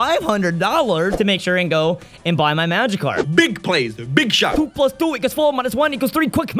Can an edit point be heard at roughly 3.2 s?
yes; 3 cuts; at 1.1 s, 3.2 s, 4.8 s

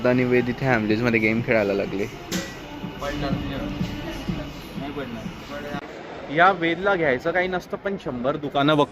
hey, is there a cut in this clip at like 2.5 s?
no; 0 cuts

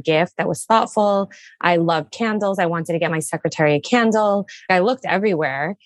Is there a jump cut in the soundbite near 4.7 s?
yes; 1 cut; at 4.7 s

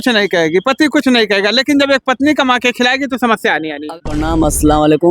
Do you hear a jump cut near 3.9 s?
yes; 1 cut; at 3.9 s

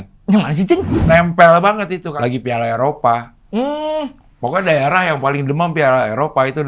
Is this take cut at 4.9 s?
no; 2 cuts; at 1.0 s, 2.1 s

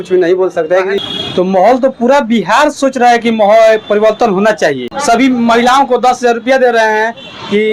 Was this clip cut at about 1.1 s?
yes; 2 cuts; at 1.1 s, 4.9 s

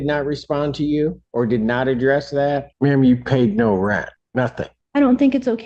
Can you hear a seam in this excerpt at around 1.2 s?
yes; 3 cuts; at 1.2 s, 2.7 s, 4.5 s

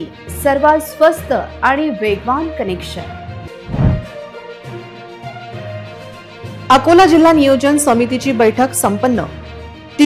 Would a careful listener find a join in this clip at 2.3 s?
no; 0 cuts

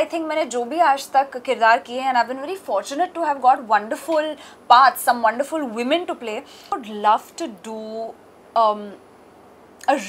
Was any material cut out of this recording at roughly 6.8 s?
yes; 1 cut; at 6.8 s

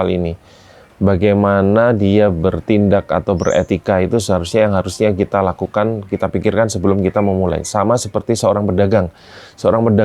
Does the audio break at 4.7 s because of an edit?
no; 0 cuts

